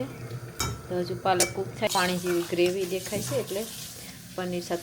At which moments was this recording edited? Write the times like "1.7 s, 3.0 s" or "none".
1.9 s